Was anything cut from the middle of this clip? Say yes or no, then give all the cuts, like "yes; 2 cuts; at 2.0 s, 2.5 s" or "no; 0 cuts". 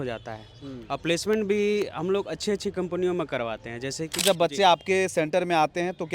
yes; 1 cut; at 4.2 s